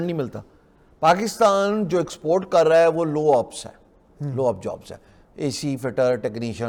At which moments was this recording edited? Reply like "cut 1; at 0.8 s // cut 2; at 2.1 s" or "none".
none